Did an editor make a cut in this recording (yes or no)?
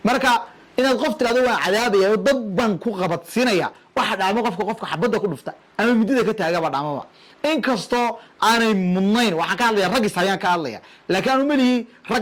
no